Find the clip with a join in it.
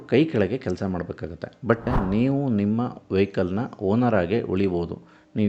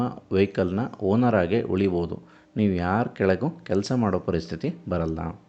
first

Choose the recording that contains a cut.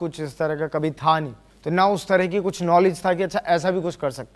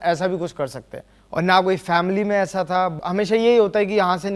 second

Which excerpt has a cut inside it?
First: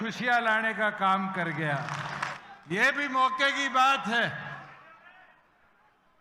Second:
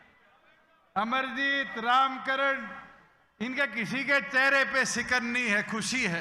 first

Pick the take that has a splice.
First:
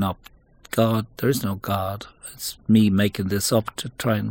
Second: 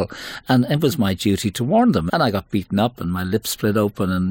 second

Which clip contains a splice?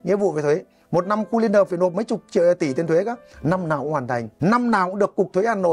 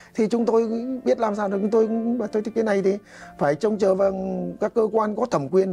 first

